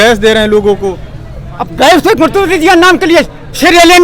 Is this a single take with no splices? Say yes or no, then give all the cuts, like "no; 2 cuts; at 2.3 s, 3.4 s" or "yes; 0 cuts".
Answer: yes; 0 cuts